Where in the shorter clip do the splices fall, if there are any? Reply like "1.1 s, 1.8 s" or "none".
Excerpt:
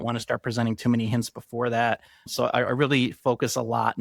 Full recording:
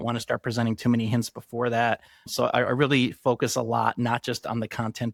none